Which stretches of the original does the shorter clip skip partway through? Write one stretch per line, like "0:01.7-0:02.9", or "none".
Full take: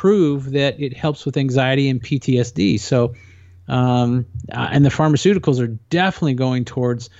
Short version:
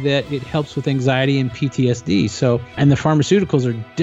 0:03.2-0:04.6